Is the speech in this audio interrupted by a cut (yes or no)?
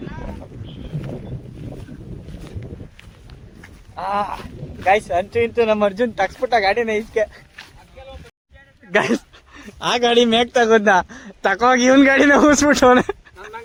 no